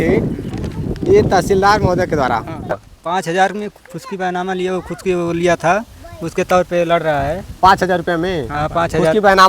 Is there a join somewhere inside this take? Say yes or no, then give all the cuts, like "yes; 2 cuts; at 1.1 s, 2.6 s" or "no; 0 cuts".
yes; 1 cut; at 2.9 s